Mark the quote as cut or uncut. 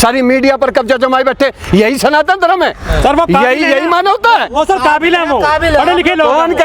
uncut